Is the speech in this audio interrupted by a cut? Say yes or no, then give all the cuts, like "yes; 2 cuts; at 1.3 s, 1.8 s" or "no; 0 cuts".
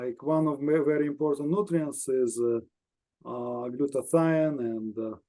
no; 0 cuts